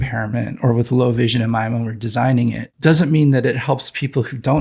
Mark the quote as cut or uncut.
cut